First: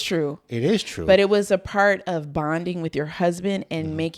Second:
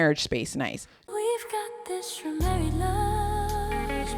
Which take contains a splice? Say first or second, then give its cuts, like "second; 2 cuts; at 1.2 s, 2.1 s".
second; 1 cut; at 1.1 s